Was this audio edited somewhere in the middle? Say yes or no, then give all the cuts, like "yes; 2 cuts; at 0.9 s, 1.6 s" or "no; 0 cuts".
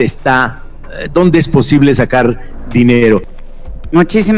yes; 1 cut; at 3.3 s